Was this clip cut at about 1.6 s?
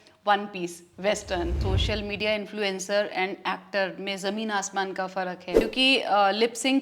yes; 2 cuts; at 1.6 s, 5.6 s

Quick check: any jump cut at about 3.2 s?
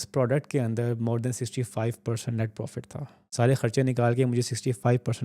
yes; 1 cut; at 3.2 s

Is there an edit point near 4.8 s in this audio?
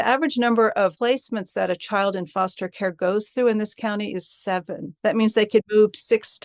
yes; 3 cuts; at 1.0 s, 4.8 s, 5.7 s

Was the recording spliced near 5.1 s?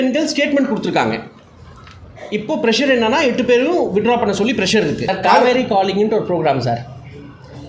yes; 1 cut; at 5.1 s

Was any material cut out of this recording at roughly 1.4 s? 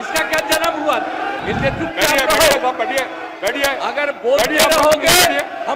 yes; 1 cut; at 1.4 s

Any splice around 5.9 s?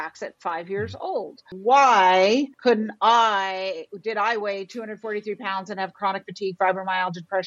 no; 2 cuts; at 1.4 s, 2.5 s

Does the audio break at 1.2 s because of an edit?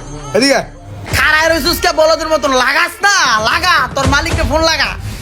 yes; 1 cut; at 1.2 s

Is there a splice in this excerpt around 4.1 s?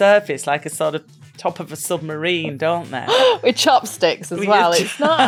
no; 0 cuts

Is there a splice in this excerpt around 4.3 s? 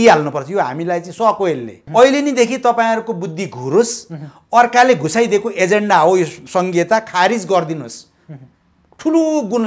no; 1 cut; at 1.8 s

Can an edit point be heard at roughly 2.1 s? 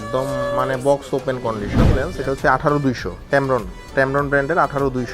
yes; 1 cut; at 2.1 s

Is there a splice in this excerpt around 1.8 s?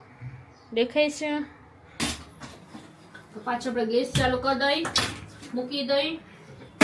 yes; 1 cut; at 1.8 s

